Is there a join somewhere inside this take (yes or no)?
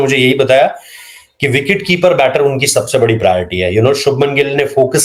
no